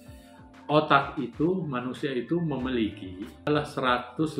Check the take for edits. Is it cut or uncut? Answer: cut